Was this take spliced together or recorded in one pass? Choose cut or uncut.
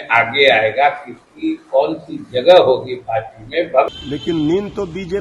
cut